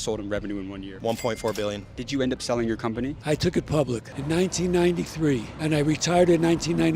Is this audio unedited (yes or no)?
no